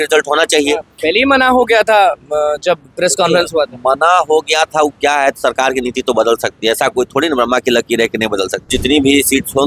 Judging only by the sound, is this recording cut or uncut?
cut